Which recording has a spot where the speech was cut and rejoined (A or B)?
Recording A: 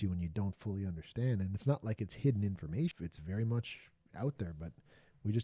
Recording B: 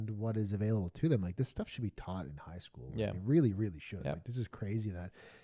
A